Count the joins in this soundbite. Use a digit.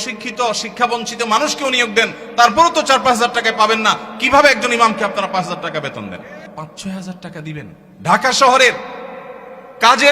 2